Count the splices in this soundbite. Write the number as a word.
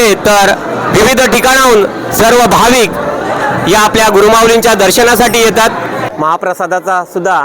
one